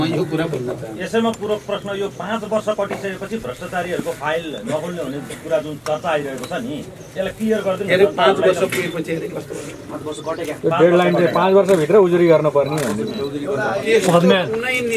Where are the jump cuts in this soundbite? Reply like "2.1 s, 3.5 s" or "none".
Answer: none